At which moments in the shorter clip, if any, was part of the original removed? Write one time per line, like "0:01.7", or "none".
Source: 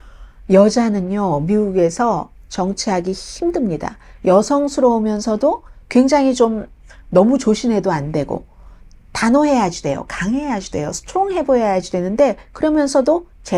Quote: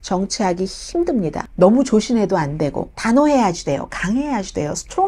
0:01.4
0:02.9